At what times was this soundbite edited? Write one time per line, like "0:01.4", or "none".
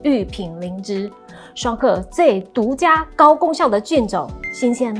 none